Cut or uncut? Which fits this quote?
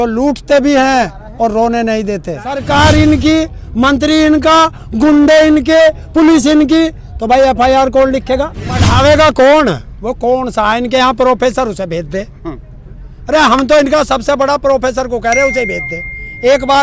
cut